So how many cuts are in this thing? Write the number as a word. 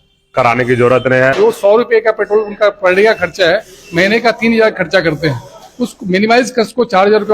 one